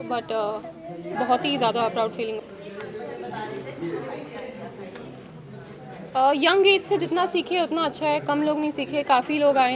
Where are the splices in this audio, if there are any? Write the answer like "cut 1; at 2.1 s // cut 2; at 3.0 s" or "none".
cut 1; at 2.4 s

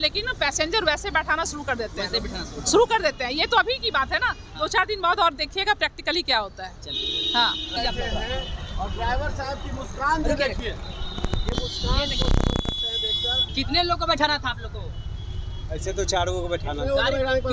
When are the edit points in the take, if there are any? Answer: none

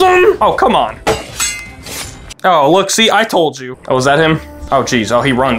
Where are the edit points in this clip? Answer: cut 1; at 3.6 s // cut 2; at 4.5 s

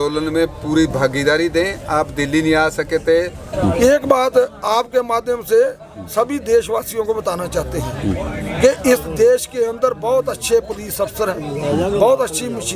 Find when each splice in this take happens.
cut 1; at 3.5 s

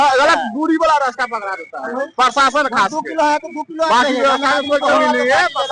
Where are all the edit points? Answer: none

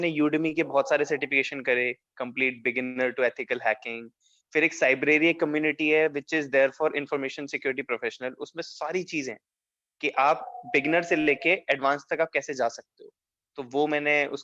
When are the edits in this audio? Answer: none

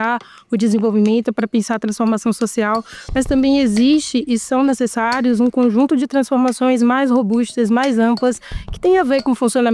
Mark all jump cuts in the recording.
none

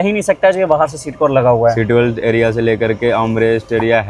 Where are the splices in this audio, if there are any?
none

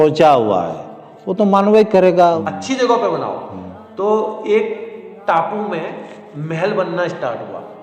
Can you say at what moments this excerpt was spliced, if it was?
cut 1; at 2.5 s

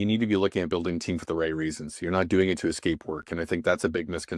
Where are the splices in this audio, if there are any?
none

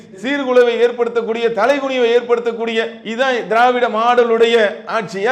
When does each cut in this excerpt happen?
none

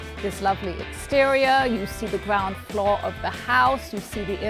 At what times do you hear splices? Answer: none

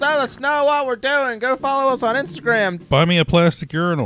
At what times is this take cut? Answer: cut 1; at 2.8 s

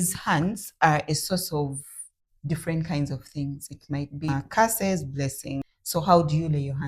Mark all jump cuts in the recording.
cut 1; at 4.3 s // cut 2; at 5.6 s

